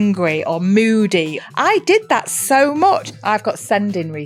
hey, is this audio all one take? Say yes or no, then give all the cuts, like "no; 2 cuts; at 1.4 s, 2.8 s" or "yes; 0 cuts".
no; 2 cuts; at 1.4 s, 3.0 s